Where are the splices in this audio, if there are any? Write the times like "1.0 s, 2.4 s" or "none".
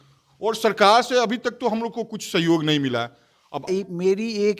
3.7 s